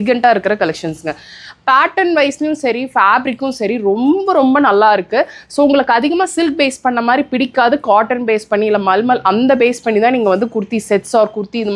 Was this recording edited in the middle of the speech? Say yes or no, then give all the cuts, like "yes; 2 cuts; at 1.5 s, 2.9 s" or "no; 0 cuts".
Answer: no; 0 cuts